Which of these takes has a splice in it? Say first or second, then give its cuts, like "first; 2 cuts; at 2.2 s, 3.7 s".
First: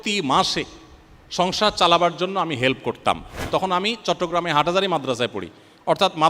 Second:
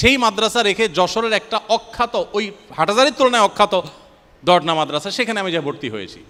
first; 1 cut; at 3.5 s